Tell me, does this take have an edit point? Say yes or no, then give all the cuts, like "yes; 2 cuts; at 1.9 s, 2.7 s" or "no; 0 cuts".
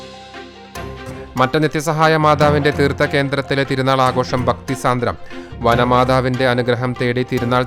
no; 0 cuts